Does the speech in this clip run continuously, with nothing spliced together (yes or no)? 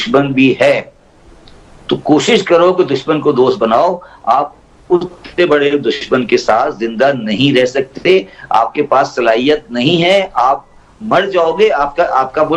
yes